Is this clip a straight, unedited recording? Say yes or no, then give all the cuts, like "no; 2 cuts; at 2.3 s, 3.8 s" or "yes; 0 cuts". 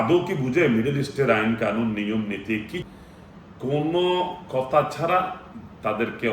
no; 1 cut; at 2.8 s